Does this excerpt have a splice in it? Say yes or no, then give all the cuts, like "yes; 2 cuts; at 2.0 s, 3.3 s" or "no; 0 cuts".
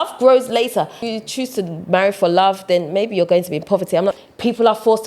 yes; 2 cuts; at 1.0 s, 4.2 s